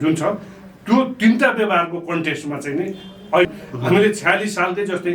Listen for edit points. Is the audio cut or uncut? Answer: cut